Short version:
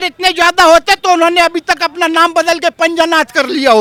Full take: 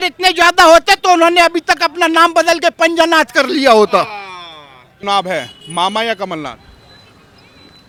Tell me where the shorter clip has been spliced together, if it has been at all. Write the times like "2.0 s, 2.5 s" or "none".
none